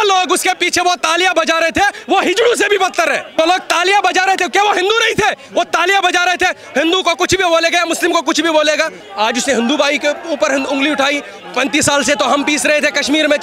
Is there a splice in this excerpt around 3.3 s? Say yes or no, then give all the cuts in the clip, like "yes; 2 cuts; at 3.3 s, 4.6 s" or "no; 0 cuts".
yes; 2 cuts; at 3.3 s, 9.0 s